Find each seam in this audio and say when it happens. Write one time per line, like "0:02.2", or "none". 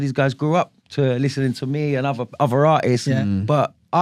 none